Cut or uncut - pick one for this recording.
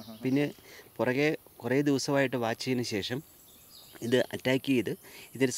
uncut